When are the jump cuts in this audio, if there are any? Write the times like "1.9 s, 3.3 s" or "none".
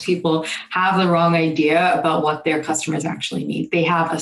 none